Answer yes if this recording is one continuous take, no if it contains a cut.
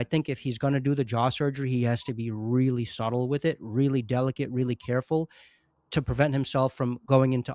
yes